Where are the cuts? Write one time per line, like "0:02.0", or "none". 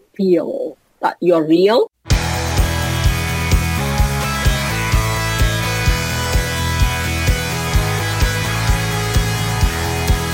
0:02.0